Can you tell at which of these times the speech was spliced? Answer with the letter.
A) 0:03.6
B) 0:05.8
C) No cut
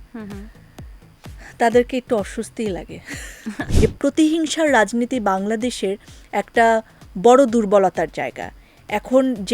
A